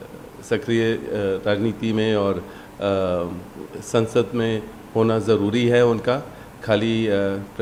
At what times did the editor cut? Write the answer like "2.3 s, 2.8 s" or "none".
none